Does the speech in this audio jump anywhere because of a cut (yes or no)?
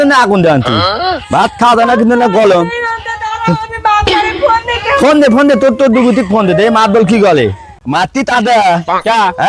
yes